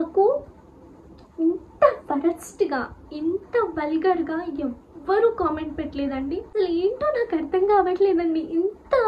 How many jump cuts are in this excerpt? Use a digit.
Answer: 1